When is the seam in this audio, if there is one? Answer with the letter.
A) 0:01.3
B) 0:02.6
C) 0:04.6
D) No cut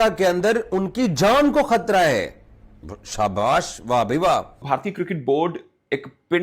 C